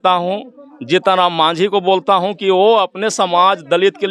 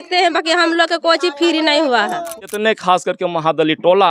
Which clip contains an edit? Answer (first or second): second